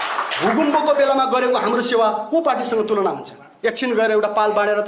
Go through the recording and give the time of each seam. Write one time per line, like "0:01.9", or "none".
none